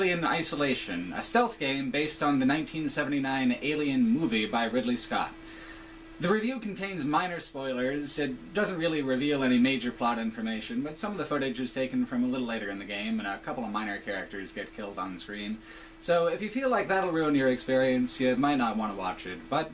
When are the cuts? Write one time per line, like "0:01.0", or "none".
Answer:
none